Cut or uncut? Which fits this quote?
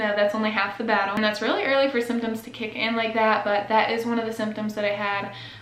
cut